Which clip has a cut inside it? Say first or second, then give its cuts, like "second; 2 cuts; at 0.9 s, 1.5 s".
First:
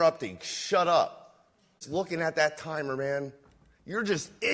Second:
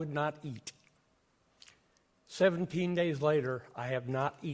first; 1 cut; at 1.8 s